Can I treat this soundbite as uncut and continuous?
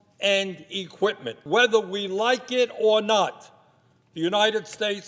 no; 1 cut; at 1.4 s

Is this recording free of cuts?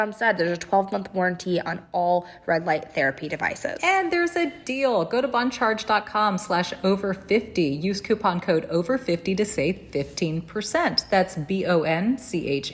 yes; 0 cuts

